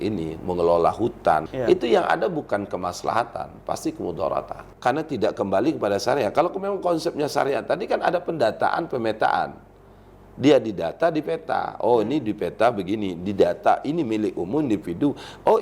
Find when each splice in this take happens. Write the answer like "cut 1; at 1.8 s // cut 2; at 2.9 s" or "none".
cut 1; at 1.5 s // cut 2; at 4.6 s